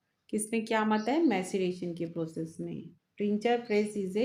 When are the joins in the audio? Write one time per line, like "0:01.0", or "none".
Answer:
none